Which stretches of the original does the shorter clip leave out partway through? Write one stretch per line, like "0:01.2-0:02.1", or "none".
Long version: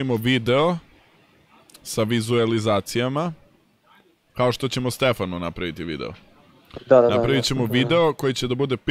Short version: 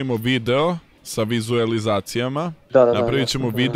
0:01.0-0:01.8
0:03.4-0:06.7